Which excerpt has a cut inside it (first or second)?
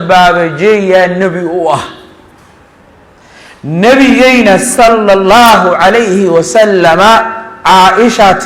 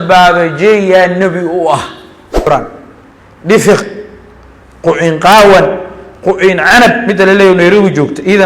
second